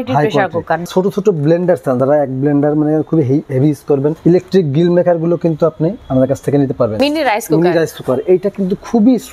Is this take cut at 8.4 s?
no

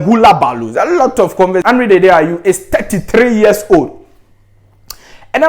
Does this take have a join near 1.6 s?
yes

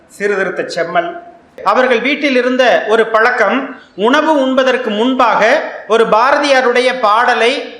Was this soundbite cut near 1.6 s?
yes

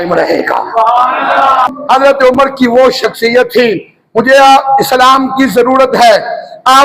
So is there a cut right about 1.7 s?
yes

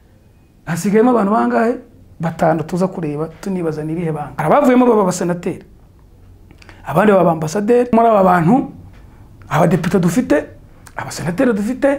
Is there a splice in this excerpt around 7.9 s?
yes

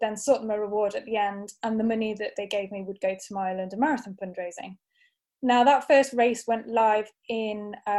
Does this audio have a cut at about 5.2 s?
yes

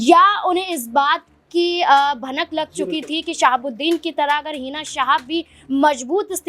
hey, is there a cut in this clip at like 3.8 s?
no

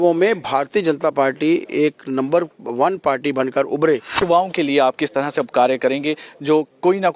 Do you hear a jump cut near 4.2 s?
yes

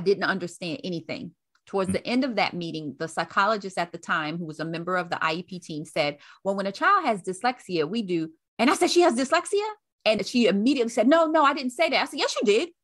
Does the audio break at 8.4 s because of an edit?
yes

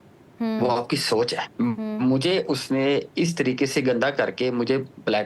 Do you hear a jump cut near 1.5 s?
yes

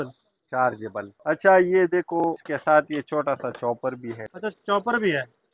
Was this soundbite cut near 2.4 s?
yes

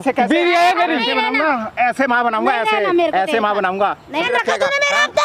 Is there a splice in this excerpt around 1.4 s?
no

